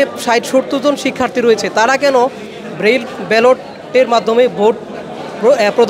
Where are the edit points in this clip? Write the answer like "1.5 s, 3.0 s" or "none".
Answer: none